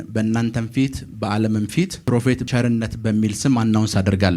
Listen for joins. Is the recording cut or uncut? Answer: cut